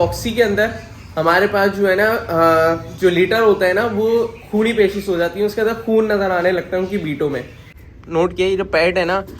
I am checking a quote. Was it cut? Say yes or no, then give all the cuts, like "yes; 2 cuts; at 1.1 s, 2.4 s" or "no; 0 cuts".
yes; 1 cut; at 7.7 s